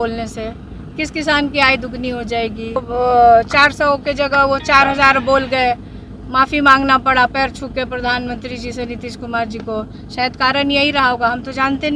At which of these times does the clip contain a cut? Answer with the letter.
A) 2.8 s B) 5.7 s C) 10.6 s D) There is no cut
A